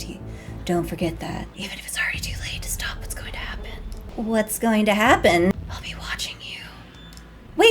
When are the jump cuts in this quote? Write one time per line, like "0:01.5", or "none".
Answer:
0:01.4
0:05.5